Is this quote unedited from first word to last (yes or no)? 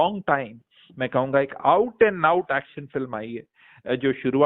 yes